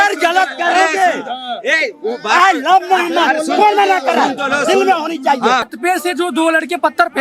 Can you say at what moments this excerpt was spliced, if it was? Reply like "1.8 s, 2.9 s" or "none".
5.7 s